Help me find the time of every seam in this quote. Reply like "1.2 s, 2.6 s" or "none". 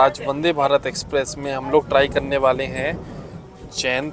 none